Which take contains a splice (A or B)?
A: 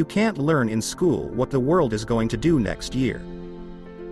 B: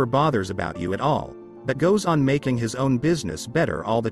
A